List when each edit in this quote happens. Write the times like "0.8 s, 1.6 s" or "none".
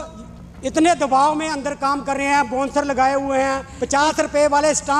3.7 s